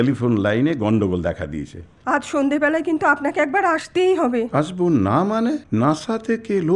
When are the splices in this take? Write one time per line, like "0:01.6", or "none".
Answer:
0:01.9
0:05.6